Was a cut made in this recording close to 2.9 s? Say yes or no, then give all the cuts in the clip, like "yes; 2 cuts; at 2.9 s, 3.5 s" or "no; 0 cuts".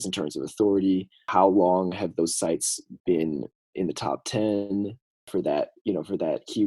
no; 2 cuts; at 1.3 s, 5.3 s